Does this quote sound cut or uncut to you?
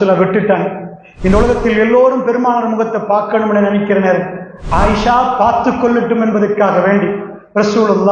uncut